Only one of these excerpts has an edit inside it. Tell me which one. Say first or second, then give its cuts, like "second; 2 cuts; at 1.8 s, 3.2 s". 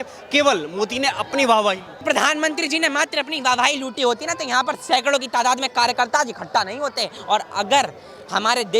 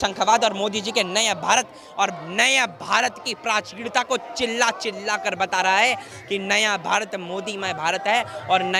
first; 2 cuts; at 2.0 s, 7.1 s